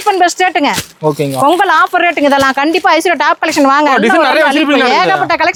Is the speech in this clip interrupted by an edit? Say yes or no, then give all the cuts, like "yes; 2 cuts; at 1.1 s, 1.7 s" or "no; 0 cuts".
no; 0 cuts